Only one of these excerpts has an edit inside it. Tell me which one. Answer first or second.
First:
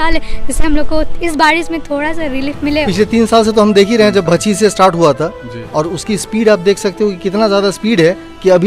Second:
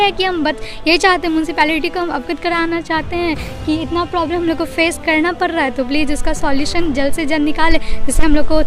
first